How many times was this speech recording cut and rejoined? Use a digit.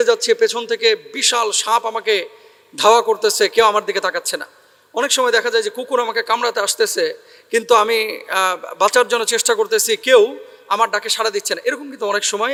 0